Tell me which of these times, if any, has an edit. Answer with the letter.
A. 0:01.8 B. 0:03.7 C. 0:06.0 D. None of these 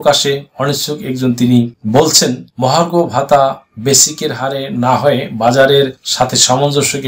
D